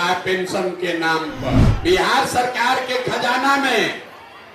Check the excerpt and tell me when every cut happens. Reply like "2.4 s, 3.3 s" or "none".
1.7 s